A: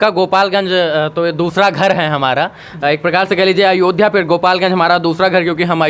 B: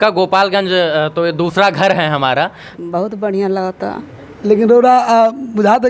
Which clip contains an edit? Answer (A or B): B